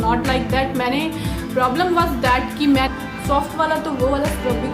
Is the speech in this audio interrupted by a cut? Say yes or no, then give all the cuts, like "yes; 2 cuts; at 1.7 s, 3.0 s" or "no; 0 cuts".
yes; 1 cut; at 2.9 s